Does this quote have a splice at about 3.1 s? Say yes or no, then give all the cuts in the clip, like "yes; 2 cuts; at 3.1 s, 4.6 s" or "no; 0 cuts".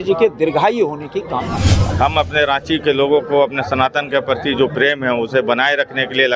no; 1 cut; at 1.9 s